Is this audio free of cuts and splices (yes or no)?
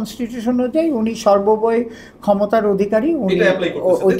yes